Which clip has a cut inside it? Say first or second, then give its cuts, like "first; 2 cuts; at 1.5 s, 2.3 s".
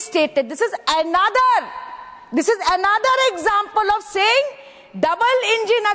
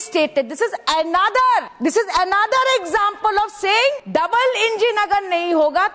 second; 2 cuts; at 1.7 s, 4.0 s